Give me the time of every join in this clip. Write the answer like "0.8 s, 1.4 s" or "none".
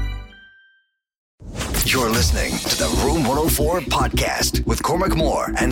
1.5 s